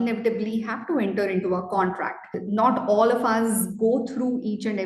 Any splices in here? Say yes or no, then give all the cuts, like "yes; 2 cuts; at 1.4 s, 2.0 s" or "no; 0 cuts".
no; 0 cuts